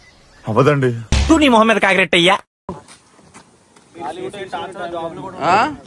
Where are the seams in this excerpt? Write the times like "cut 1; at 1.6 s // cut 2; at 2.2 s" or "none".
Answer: cut 1; at 2.7 s